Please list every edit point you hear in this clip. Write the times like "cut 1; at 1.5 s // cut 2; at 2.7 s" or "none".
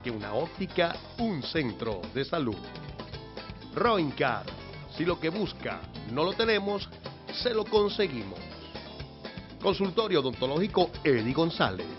none